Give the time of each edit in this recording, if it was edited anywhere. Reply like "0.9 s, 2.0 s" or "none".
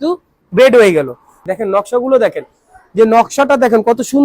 1.4 s